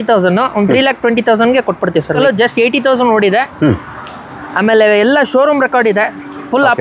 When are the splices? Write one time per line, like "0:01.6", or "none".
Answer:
0:02.2